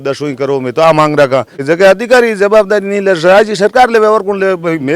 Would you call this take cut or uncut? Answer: cut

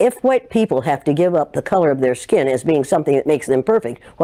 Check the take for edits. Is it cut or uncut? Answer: uncut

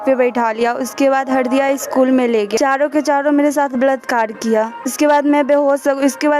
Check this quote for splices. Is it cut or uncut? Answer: cut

